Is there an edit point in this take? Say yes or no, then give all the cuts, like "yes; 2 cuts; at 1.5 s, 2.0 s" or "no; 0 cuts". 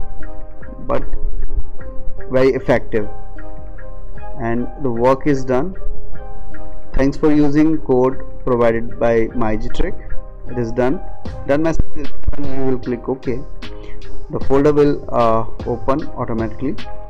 no; 0 cuts